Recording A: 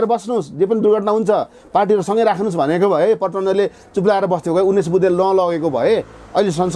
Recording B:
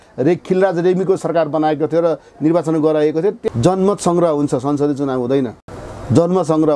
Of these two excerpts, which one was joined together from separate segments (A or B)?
B